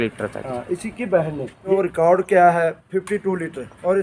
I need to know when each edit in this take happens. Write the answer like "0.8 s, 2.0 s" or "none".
1.7 s